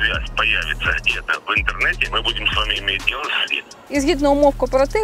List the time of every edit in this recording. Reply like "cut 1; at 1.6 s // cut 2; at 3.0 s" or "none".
cut 1; at 2.0 s // cut 2; at 3.8 s